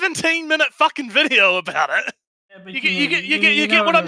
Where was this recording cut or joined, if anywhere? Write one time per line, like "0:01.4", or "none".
0:02.7